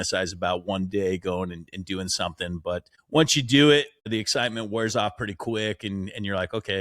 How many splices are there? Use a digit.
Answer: 2